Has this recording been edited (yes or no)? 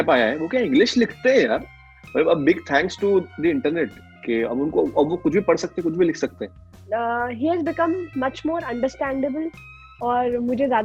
yes